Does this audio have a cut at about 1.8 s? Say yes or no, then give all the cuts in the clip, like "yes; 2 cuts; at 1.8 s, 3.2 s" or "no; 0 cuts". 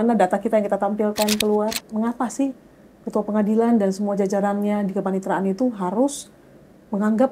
yes; 1 cut; at 1.8 s